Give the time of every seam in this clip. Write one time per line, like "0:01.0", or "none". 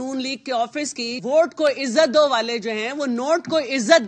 0:01.1